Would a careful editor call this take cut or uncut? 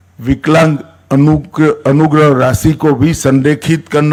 uncut